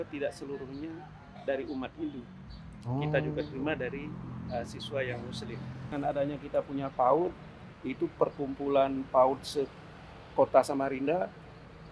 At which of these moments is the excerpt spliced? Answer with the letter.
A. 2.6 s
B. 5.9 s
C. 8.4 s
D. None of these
B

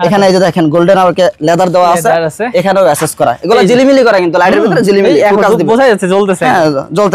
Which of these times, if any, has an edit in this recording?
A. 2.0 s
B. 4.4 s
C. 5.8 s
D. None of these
D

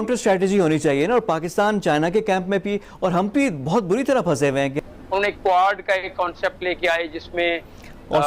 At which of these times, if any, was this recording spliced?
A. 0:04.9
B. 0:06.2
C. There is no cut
A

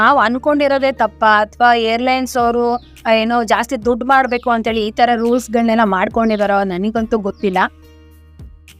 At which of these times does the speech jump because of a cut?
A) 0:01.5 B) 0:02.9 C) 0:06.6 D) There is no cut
D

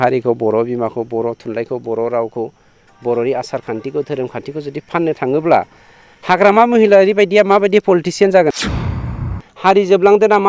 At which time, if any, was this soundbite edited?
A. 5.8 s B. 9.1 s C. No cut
B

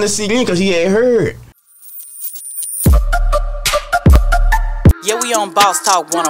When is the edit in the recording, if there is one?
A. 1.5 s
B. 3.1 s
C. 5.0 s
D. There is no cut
A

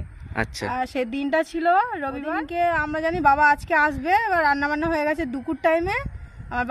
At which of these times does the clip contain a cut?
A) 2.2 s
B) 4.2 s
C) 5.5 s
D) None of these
A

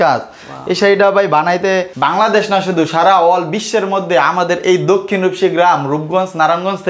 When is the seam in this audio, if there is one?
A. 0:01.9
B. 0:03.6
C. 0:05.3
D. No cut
A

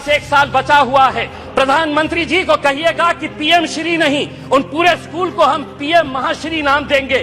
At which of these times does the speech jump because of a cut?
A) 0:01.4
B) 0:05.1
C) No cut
A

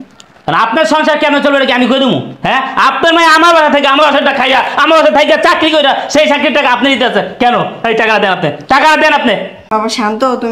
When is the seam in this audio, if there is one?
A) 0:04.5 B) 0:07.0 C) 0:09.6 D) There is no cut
C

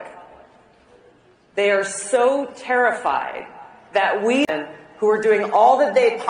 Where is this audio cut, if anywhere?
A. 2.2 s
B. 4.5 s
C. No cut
B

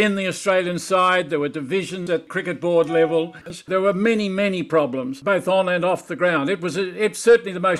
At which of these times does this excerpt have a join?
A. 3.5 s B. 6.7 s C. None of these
A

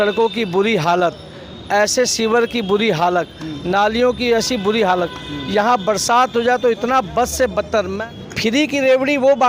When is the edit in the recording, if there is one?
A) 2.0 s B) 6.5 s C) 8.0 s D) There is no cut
C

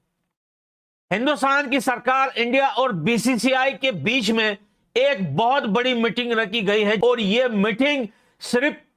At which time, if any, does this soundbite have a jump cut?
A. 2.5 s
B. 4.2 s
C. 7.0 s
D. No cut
C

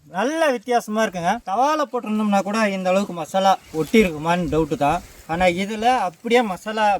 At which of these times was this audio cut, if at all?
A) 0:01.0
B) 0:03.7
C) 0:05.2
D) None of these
C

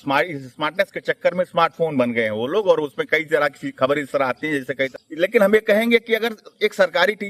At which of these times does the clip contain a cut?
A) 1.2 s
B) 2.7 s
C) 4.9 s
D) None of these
C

